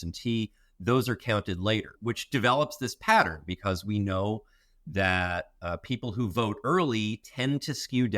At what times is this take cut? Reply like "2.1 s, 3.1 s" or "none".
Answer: 1.9 s